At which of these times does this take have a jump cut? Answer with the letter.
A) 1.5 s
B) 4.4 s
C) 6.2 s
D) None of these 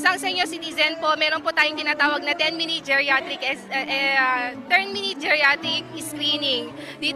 B